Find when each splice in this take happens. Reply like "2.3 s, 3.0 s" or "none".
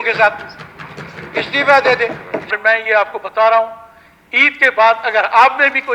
2.5 s